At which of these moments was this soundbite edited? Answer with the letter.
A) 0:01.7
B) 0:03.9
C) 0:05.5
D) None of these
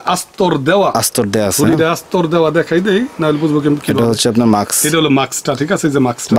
D